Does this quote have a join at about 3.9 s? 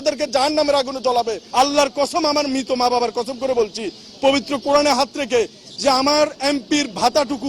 no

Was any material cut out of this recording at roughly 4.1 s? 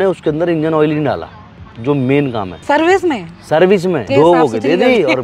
yes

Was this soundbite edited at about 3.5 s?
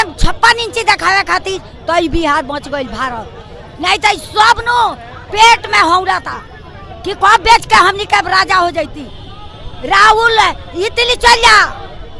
no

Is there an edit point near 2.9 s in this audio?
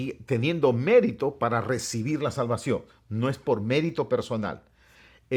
no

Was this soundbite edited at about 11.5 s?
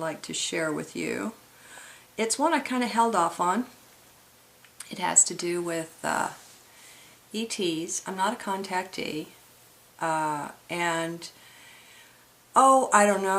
no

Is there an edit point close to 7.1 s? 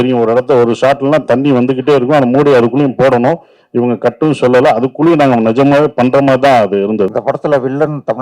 yes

